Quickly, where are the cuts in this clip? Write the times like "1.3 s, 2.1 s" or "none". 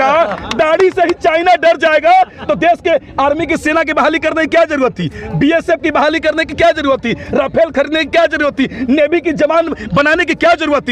none